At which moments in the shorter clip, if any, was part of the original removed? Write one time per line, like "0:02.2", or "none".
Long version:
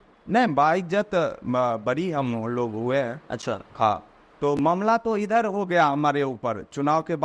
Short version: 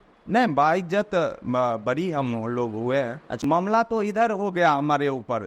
0:03.4